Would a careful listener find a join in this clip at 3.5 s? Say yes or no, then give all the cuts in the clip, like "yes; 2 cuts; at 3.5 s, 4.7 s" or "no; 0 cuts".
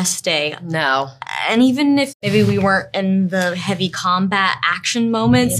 no; 1 cut; at 2.1 s